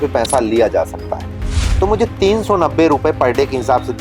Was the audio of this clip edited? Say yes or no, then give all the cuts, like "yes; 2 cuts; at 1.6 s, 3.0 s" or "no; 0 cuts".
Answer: yes; 1 cut; at 1.5 s